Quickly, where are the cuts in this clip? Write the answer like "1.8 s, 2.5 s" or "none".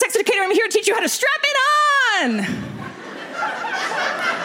none